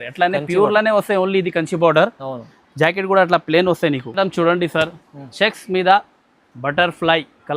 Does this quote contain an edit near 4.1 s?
yes; 1 cut; at 4.1 s

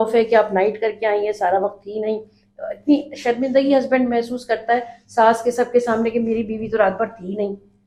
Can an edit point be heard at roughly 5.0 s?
no; 0 cuts

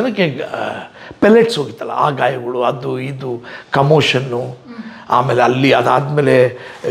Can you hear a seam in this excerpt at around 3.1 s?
no; 0 cuts

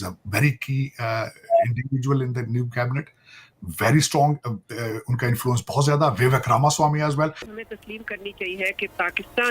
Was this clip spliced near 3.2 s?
no; 0 cuts

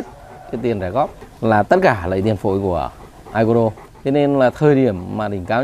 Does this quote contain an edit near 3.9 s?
yes; 2 cuts; at 1.2 s, 3.9 s

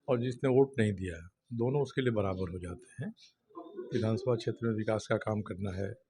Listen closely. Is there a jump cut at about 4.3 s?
no; 0 cuts

